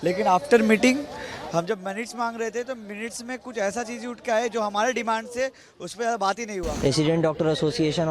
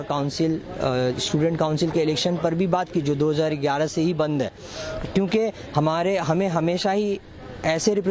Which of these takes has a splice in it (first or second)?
first